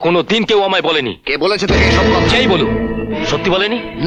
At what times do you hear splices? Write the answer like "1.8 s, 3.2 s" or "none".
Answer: none